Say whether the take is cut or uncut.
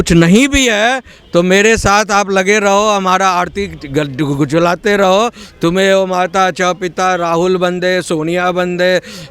uncut